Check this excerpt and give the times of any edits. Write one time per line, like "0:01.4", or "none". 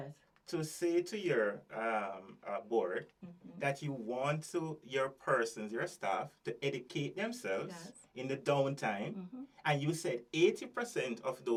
none